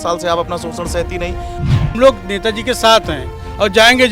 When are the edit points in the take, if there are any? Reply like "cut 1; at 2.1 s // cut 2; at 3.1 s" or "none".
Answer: cut 1; at 1.8 s